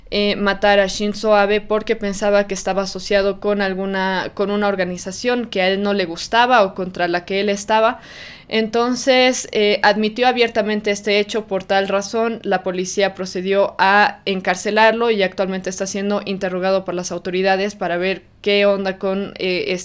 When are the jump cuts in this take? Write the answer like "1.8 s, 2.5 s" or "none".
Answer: none